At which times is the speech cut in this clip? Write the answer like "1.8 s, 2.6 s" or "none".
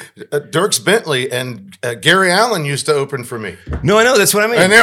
none